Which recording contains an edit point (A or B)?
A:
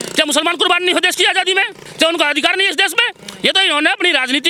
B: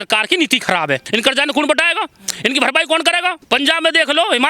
B